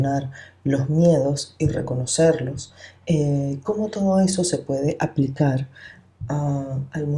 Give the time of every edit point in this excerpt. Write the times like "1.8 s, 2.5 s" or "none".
none